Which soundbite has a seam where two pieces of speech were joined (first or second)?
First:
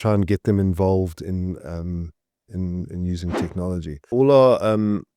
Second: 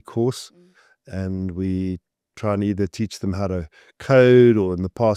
first